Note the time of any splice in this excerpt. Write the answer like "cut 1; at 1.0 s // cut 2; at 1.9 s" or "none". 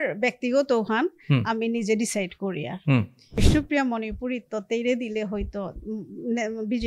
cut 1; at 3.2 s